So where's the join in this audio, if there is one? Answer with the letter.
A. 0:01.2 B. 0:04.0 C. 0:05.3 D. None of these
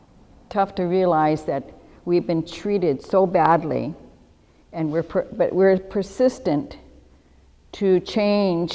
C